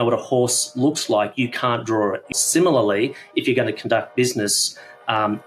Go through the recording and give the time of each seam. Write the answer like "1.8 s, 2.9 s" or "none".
2.3 s